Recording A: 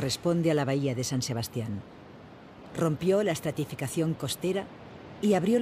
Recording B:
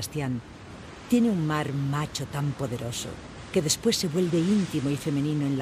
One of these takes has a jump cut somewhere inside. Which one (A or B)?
A